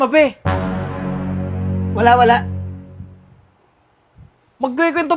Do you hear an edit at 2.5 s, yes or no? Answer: no